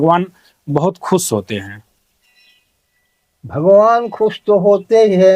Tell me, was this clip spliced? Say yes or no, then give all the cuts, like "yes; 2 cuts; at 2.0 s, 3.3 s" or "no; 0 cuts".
no; 0 cuts